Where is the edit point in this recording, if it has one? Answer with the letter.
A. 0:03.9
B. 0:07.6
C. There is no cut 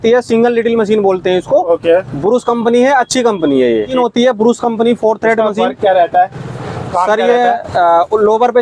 A